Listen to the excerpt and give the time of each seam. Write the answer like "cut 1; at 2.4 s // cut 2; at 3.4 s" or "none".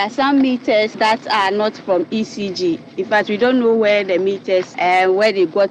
cut 1; at 0.9 s // cut 2; at 4.7 s